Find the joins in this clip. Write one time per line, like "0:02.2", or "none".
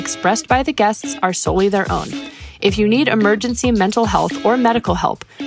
none